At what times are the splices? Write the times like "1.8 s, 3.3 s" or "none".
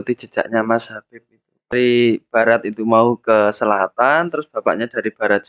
1.7 s